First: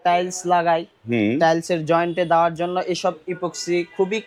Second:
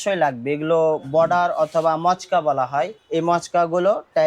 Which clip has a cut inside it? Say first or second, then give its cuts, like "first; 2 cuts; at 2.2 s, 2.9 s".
second; 1 cut; at 3.0 s